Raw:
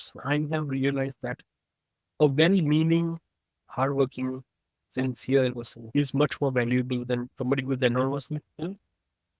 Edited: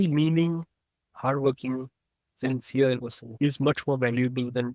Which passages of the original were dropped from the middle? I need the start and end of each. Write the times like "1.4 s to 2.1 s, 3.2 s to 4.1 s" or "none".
none